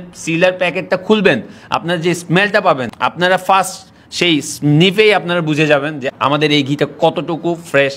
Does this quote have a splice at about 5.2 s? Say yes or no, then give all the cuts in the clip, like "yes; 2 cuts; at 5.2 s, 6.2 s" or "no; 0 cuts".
no; 0 cuts